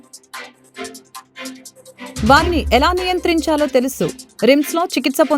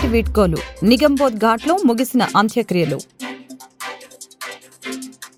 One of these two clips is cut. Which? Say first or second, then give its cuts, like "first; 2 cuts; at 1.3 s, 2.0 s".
first; 2 cuts; at 1.3 s, 2.2 s